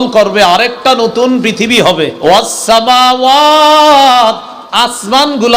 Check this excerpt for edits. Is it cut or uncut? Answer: cut